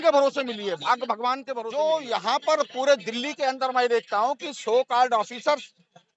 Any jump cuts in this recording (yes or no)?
yes